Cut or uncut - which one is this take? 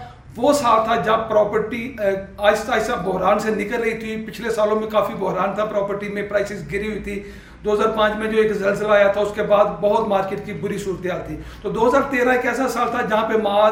uncut